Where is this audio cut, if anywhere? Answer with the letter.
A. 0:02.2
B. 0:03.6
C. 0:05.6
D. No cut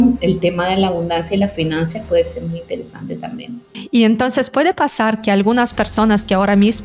B